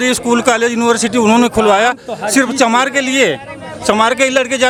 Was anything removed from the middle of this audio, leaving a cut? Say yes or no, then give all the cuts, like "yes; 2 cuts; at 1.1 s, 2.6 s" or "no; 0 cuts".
no; 0 cuts